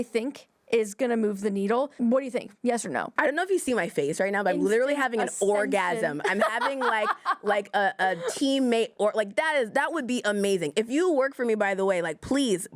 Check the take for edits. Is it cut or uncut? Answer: cut